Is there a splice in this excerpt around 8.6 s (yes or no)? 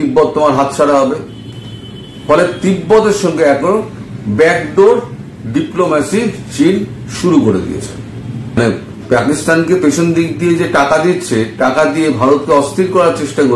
yes